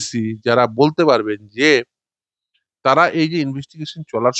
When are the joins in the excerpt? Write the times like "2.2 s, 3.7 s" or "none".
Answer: none